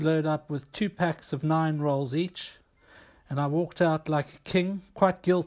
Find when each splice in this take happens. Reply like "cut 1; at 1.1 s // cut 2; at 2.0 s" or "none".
none